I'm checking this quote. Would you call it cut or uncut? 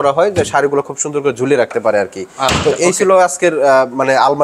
uncut